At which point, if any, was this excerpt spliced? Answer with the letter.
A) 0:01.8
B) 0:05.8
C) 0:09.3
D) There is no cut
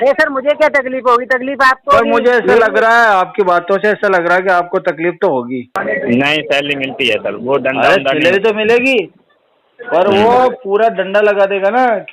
B